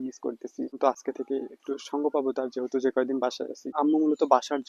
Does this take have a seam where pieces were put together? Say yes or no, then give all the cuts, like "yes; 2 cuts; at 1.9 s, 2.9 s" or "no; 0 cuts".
yes; 2 cuts; at 0.7 s, 3.7 s